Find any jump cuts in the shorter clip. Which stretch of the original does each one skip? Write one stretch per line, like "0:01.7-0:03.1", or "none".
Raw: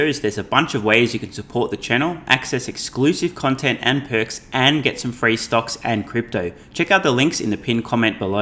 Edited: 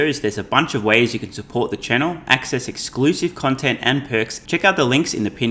0:04.4-0:06.6